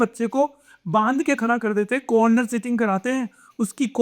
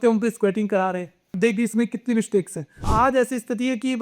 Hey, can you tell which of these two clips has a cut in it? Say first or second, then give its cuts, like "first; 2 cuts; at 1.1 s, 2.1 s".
second; 2 cuts; at 1.3 s, 2.8 s